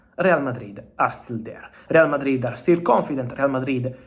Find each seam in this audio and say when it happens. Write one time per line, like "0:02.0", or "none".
none